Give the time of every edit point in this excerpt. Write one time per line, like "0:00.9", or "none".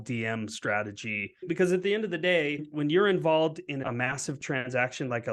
0:01.5
0:02.7
0:03.8